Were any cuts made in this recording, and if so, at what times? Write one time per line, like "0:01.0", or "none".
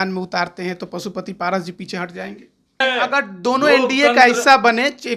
0:02.8